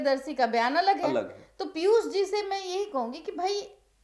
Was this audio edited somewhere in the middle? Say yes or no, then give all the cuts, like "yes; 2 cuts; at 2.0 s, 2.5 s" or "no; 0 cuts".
no; 0 cuts